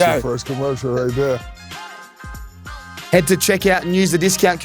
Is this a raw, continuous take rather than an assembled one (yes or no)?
yes